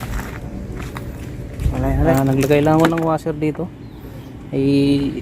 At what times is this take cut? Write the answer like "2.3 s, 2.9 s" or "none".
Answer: 2.1 s